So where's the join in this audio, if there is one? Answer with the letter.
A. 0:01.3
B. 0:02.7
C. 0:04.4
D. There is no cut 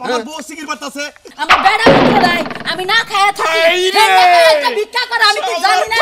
A